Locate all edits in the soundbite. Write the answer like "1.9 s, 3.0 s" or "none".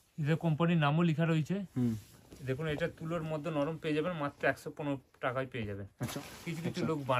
5.9 s